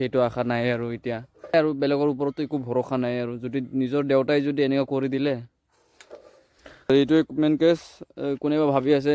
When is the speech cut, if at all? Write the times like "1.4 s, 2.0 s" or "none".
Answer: 1.5 s, 6.9 s